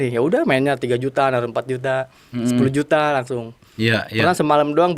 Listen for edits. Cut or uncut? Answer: uncut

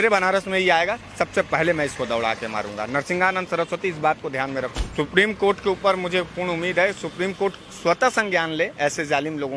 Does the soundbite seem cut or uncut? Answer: uncut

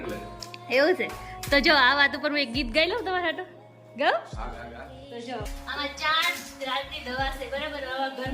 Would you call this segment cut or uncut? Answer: cut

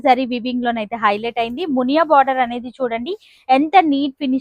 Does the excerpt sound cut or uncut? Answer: uncut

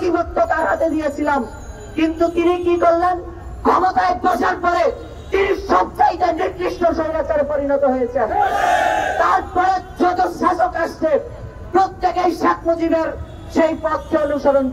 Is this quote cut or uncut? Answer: uncut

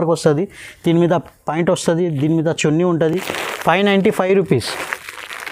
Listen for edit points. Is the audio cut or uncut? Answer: uncut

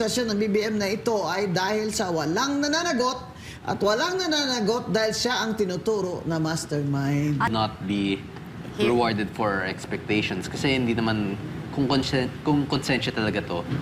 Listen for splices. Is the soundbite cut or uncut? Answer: cut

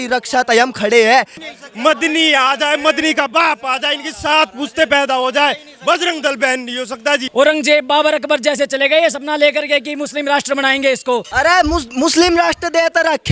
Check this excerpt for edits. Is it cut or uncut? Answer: cut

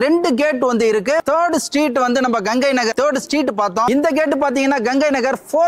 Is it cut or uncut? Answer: cut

